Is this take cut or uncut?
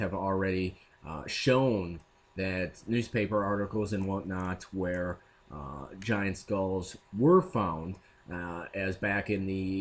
uncut